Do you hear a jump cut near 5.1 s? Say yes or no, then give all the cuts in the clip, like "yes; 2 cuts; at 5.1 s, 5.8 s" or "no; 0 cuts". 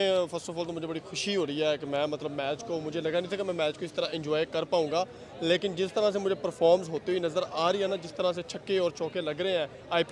no; 0 cuts